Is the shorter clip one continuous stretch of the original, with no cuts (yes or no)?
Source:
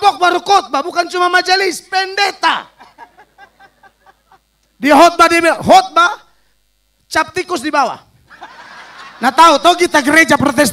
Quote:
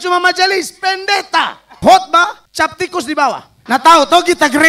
no